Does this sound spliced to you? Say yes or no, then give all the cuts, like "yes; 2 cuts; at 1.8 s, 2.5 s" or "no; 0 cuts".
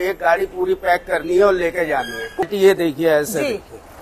yes; 1 cut; at 2.4 s